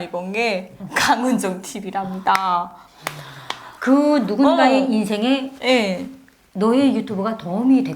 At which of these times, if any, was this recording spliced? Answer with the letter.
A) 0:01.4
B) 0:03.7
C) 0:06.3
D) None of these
B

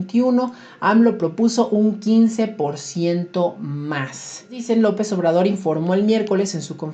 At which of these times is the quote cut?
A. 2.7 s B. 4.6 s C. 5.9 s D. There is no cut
B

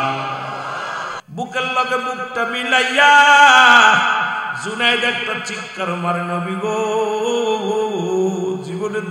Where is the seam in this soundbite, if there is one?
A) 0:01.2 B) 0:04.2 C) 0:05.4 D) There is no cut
A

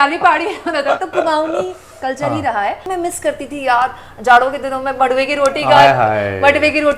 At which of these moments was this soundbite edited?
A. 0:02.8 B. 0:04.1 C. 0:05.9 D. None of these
A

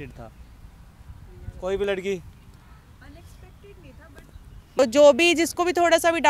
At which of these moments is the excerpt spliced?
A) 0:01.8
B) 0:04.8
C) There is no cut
B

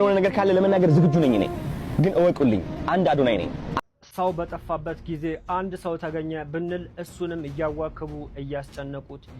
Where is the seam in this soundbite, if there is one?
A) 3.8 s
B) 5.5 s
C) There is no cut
A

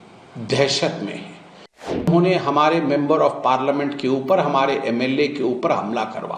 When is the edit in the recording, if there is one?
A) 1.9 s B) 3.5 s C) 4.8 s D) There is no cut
A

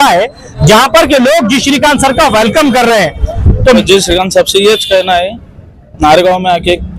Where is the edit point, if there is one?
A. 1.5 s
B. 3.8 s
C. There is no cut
B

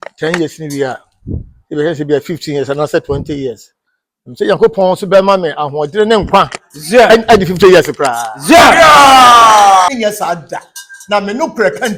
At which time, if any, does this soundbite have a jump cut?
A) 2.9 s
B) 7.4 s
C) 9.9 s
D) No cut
C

